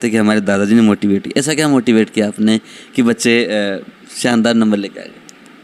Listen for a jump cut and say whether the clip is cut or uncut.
uncut